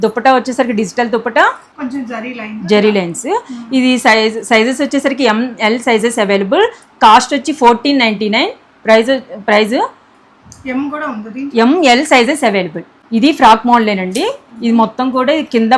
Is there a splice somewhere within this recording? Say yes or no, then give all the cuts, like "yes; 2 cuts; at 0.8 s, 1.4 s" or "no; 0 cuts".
no; 0 cuts